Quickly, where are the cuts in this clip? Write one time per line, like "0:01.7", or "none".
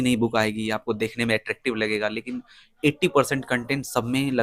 none

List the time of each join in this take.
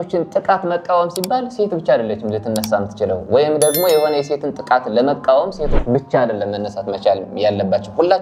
none

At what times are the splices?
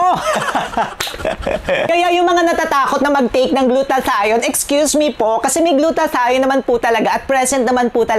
none

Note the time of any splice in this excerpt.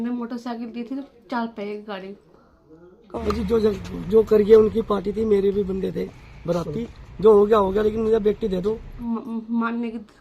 0:03.2
0:09.0

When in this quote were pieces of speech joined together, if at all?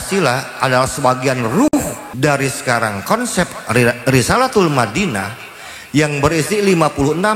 0:01.7

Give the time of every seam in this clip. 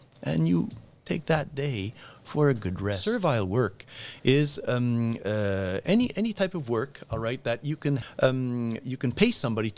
0:03.0
0:08.0

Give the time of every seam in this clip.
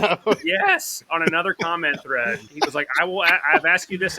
0:02.5

